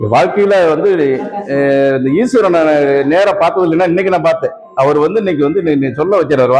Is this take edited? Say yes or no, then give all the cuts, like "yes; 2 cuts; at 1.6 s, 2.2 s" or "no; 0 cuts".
no; 0 cuts